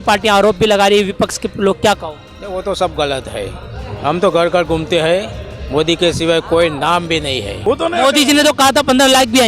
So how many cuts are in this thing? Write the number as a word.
one